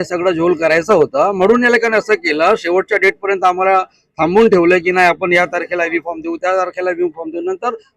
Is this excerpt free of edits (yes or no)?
yes